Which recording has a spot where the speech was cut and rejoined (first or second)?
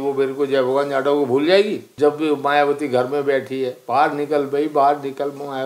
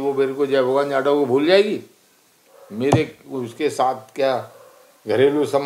first